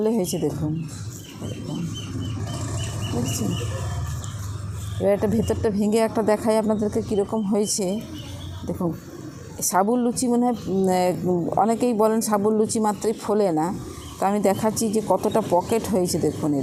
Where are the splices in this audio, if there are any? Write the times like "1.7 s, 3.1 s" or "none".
none